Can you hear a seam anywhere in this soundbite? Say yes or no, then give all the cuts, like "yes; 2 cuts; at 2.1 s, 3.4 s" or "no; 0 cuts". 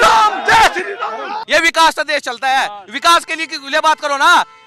yes; 1 cut; at 1.4 s